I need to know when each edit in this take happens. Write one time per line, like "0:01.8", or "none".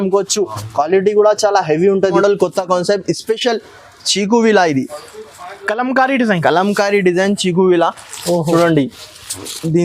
0:02.2